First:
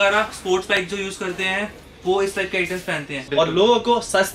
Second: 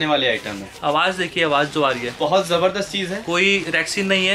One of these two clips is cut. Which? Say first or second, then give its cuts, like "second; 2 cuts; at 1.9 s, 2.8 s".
first; 1 cut; at 3.2 s